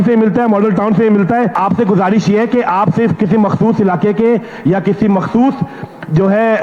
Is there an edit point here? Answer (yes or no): yes